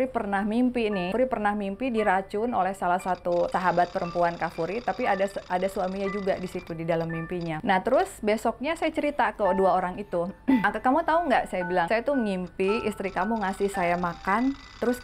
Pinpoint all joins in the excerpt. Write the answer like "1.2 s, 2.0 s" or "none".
1.1 s, 3.5 s, 7.6 s, 10.6 s, 11.9 s